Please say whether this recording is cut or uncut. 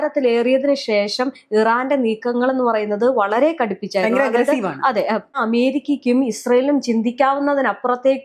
cut